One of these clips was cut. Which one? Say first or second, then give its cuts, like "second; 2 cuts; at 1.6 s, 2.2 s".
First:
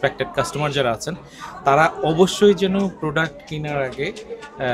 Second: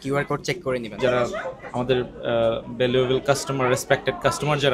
second; 1 cut; at 1.0 s